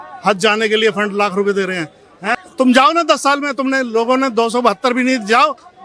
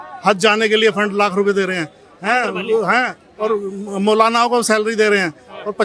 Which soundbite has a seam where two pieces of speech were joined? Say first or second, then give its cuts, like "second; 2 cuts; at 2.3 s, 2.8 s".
first; 1 cut; at 2.4 s